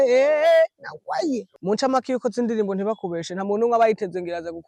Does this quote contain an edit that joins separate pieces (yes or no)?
yes